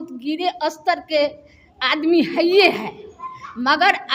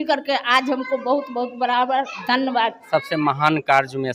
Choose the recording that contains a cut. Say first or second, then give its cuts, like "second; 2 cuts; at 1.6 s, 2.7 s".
second; 1 cut; at 2.9 s